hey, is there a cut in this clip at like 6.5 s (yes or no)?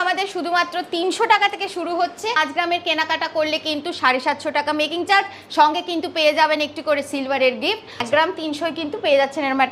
no